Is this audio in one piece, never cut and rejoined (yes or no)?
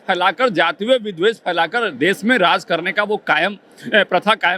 yes